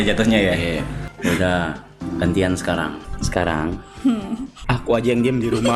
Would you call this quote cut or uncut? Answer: cut